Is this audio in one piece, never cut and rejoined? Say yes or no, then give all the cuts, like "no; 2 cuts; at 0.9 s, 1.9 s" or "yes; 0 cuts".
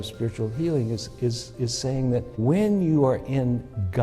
no; 1 cut; at 2.3 s